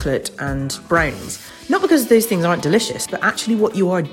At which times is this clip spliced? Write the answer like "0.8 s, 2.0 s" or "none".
3.0 s